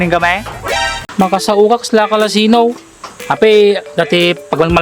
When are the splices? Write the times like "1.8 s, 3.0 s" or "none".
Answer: 1.0 s